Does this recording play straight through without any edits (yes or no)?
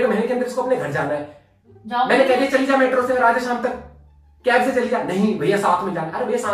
yes